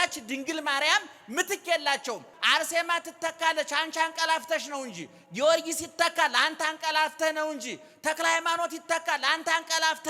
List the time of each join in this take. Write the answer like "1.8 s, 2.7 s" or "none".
2.3 s